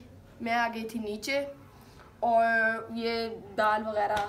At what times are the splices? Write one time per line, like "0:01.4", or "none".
none

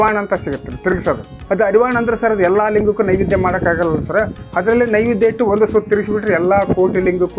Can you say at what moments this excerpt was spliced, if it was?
0:01.3

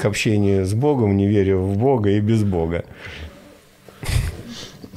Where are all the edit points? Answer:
none

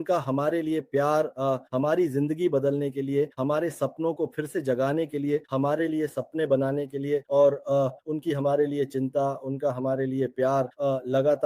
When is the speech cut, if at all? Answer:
none

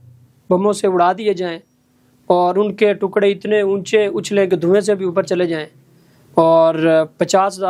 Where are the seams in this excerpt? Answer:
none

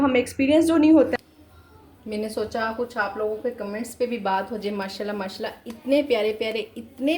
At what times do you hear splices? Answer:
0:01.1

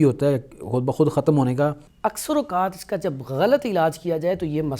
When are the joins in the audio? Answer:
0:01.9

